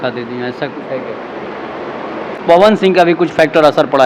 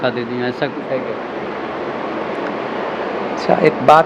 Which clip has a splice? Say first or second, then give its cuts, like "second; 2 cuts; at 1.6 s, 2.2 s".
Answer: first; 1 cut; at 2.4 s